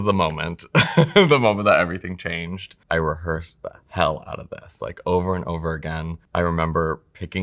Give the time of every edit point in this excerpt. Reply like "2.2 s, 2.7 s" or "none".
2.8 s

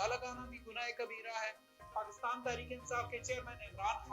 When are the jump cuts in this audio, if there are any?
1.8 s

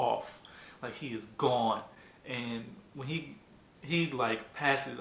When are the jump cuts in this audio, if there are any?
none

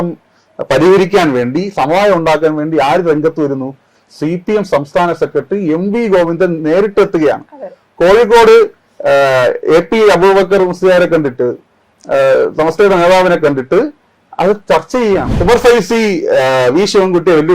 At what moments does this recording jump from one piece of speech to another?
15.3 s

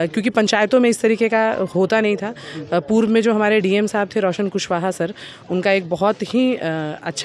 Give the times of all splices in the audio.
none

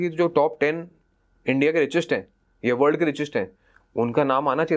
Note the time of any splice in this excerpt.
none

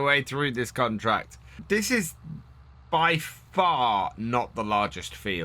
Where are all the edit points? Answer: 1.6 s

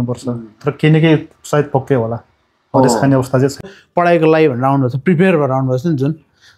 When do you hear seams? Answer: 3.7 s

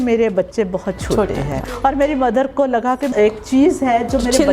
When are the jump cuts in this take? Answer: 1.6 s, 3.1 s

